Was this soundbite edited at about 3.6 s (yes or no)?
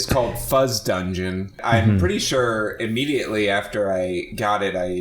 no